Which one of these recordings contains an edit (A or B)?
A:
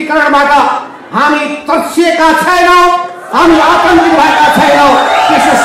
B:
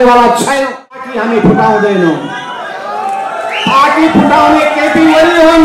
B